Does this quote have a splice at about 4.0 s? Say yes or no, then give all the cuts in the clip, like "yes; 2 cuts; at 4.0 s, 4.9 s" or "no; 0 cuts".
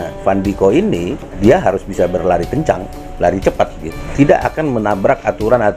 yes; 2 cuts; at 1.4 s, 4.0 s